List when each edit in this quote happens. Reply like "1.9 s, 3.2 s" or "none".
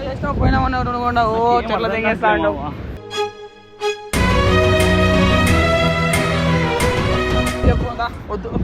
7.6 s